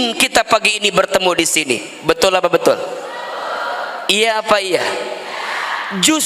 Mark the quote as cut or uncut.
uncut